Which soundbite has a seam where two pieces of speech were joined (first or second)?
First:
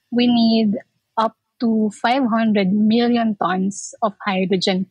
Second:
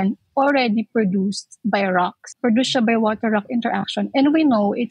second